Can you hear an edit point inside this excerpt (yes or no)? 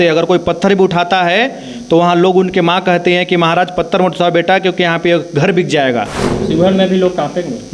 yes